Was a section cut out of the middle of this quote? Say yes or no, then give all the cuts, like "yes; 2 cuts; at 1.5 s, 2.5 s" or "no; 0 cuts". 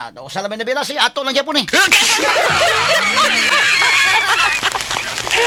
no; 0 cuts